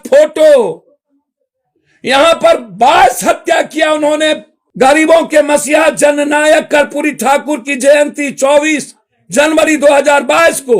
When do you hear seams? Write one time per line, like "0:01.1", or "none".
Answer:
0:04.6